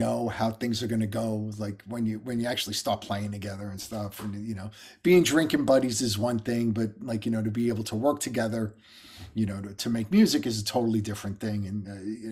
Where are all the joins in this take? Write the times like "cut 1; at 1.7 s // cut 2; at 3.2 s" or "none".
none